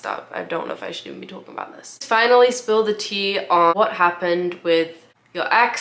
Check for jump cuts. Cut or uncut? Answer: cut